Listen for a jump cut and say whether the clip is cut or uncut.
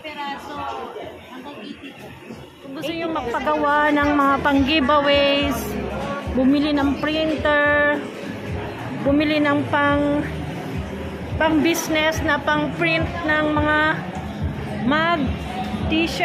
cut